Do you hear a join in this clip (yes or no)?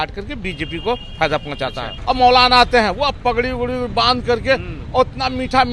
yes